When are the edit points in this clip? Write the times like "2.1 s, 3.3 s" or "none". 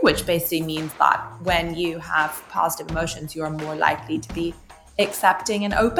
none